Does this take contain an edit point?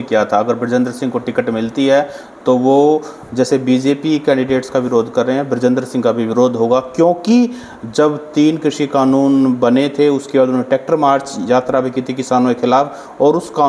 no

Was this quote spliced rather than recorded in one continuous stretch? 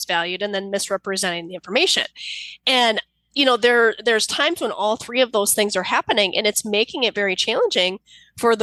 no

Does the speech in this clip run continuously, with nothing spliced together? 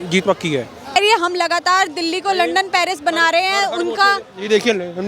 no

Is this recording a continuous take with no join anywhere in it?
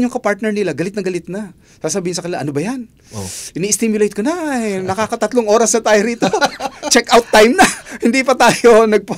yes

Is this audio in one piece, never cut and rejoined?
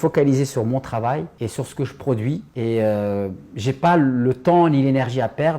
yes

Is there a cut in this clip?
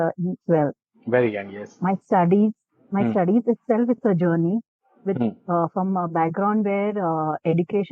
no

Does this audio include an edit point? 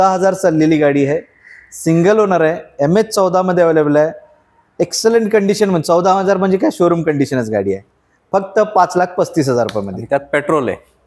no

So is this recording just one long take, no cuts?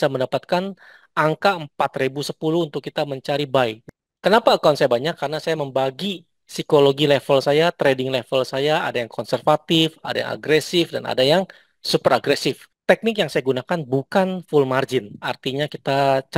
no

